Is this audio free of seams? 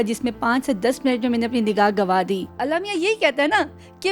no; 1 cut; at 2.5 s

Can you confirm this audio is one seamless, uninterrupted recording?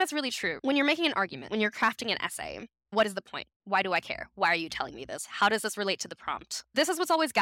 yes; 0 cuts

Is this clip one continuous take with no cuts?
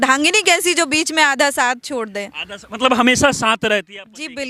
yes; 0 cuts

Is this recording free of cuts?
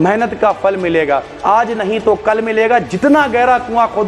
yes; 0 cuts

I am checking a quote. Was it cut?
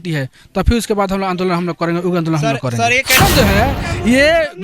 yes; 1 cut; at 3.2 s

